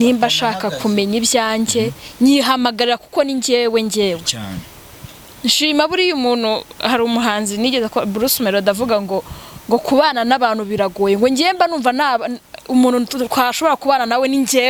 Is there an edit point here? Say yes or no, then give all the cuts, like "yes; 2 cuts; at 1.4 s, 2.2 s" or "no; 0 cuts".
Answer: no; 0 cuts